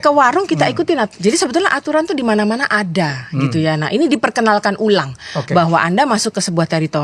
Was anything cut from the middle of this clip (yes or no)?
no